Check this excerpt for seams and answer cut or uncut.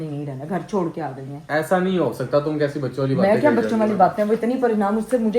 uncut